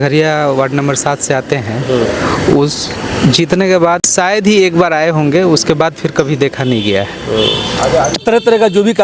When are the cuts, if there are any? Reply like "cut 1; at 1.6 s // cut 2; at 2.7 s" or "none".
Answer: cut 1; at 4.1 s // cut 2; at 8.2 s